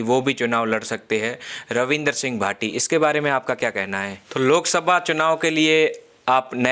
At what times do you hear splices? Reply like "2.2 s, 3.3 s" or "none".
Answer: 4.1 s